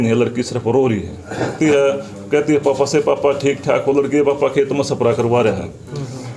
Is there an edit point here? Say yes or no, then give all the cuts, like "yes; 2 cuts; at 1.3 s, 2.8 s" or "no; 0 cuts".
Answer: yes; 1 cut; at 1.5 s